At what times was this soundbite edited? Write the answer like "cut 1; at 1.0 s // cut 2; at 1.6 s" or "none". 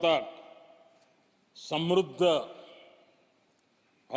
none